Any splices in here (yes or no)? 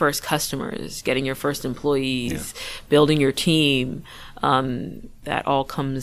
yes